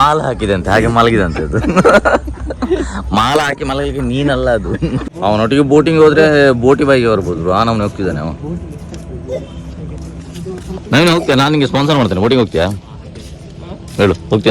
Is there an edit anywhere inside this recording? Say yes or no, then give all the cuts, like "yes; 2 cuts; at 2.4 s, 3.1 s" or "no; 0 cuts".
yes; 3 cuts; at 2.3 s, 5.4 s, 8.7 s